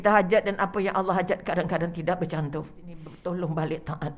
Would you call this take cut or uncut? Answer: cut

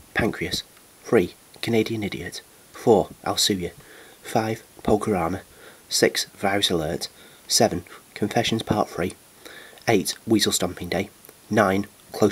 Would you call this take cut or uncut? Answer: uncut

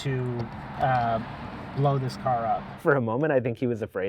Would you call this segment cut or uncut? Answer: cut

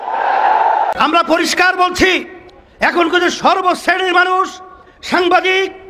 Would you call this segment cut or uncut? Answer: cut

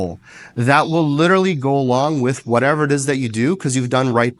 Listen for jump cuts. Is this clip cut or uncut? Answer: uncut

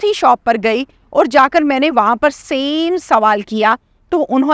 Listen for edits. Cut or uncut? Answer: uncut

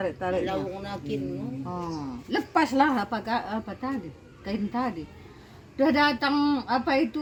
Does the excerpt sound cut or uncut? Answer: uncut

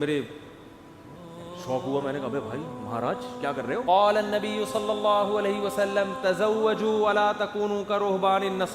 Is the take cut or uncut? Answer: cut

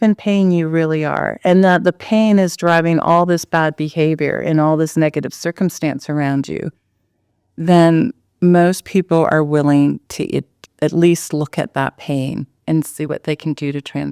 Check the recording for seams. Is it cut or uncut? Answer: uncut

